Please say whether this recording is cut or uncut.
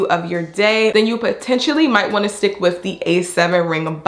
cut